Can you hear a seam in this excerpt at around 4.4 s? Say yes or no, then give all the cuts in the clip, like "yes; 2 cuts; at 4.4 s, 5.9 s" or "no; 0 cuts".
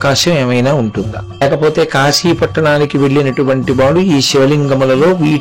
no; 1 cut; at 1.4 s